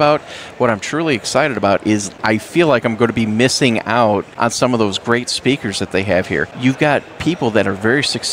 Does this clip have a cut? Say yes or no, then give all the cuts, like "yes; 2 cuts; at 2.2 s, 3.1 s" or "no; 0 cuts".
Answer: yes; 3 cuts; at 2.1 s, 4.3 s, 6.5 s